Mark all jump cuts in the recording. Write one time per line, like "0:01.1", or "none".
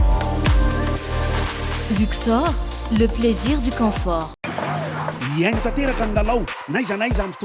0:04.4